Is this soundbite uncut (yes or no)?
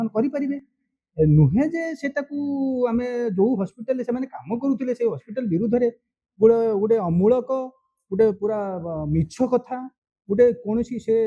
yes